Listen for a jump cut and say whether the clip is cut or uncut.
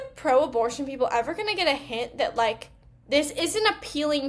uncut